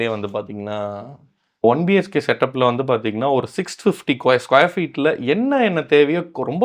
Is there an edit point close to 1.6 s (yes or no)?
yes